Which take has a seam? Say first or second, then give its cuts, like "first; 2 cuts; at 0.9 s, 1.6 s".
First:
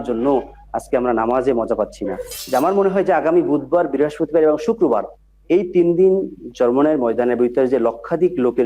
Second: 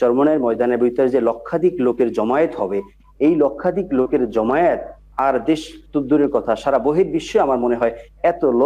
first; 1 cut; at 2.3 s